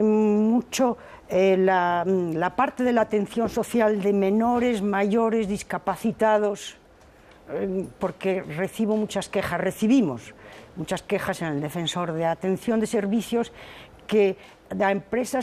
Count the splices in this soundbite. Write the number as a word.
one